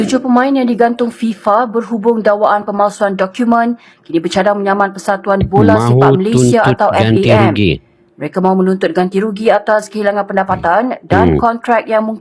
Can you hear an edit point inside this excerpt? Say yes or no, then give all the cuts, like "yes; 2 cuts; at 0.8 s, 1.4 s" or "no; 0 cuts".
no; 0 cuts